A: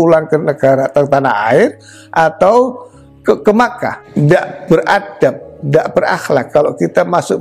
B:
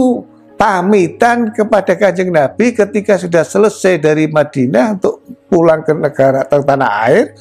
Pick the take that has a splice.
A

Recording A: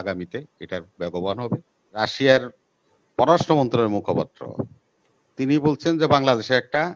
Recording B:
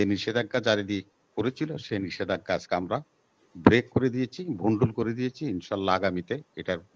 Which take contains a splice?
A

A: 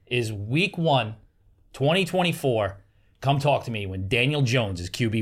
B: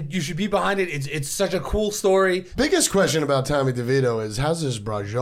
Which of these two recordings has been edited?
B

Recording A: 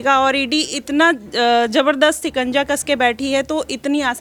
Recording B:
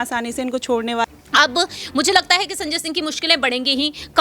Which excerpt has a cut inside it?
B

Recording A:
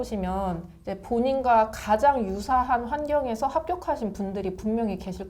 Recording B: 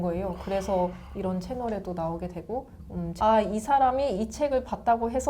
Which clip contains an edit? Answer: B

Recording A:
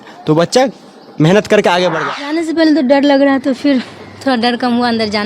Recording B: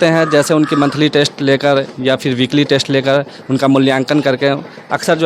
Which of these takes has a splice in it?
A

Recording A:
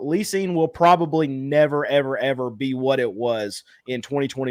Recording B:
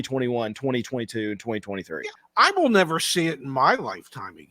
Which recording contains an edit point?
B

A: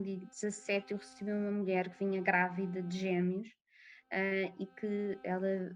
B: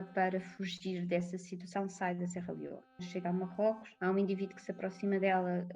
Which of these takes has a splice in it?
B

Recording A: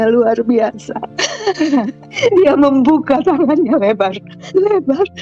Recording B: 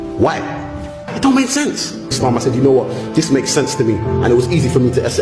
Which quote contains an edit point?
A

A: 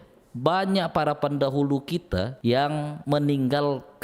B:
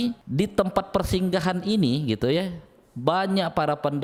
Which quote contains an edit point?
A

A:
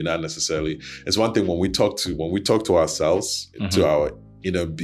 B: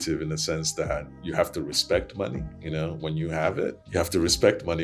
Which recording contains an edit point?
B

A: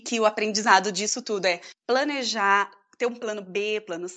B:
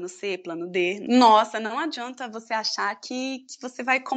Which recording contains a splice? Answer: B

